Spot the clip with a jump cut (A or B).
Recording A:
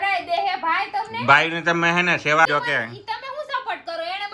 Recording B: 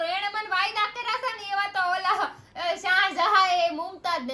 A